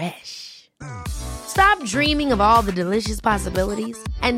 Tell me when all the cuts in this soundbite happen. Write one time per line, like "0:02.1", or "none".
none

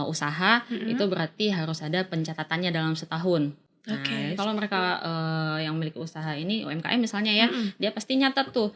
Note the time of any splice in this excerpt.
none

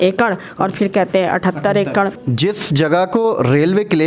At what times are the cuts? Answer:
0:02.2

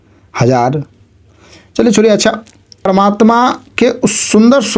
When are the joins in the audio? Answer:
0:02.8

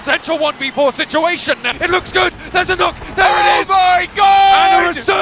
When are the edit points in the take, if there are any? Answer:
0:01.7

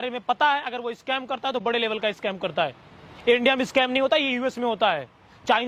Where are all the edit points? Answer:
none

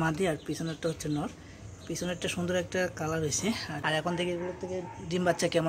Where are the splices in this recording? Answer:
0:03.8

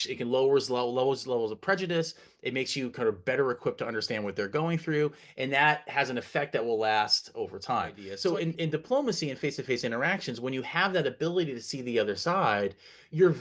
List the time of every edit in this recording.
0:08.1

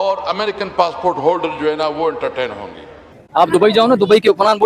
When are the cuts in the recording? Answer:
0:03.2

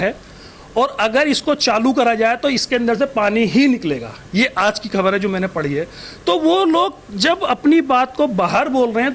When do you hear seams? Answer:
none

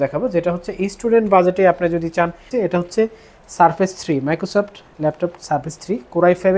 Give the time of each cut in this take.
0:02.5

